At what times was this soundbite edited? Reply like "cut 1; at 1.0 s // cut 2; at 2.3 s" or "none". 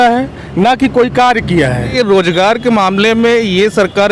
cut 1; at 1.9 s